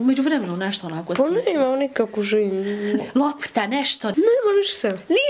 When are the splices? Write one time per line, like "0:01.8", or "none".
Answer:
0:03.1
0:04.1